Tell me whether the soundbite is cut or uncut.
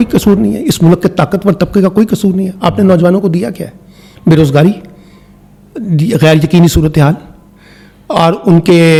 uncut